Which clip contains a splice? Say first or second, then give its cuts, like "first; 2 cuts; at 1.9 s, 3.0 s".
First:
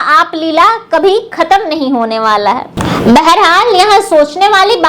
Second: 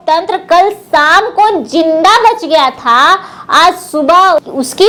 first; 1 cut; at 2.7 s